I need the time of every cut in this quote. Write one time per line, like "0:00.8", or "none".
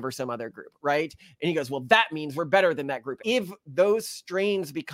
0:03.2